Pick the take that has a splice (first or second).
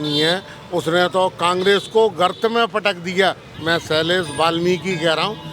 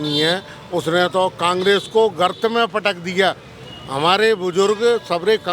first